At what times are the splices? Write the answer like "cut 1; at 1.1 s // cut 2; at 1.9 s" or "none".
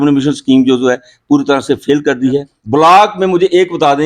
cut 1; at 2.5 s